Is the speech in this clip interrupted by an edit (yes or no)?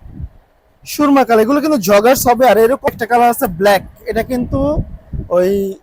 yes